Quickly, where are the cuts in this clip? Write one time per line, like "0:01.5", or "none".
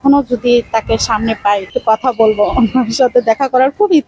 0:01.7